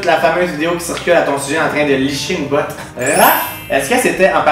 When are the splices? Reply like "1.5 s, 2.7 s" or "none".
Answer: 2.8 s